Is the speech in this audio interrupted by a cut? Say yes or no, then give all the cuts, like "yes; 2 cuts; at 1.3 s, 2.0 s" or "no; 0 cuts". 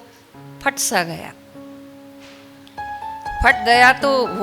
no; 0 cuts